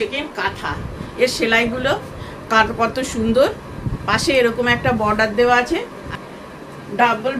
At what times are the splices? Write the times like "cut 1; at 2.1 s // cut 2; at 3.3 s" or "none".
cut 1; at 0.9 s // cut 2; at 6.0 s